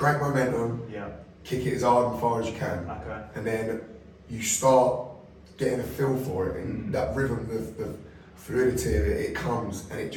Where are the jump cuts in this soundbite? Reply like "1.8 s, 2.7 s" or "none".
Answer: none